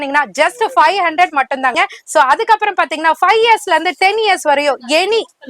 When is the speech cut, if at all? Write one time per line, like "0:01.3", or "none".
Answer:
0:01.7